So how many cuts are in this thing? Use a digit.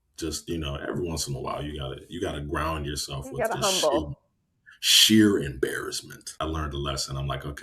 1